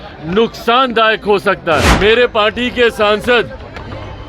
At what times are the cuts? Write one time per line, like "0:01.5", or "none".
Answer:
0:01.9